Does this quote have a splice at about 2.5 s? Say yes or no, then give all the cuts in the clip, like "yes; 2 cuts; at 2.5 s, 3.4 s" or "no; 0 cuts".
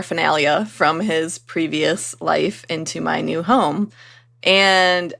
no; 1 cut; at 3.9 s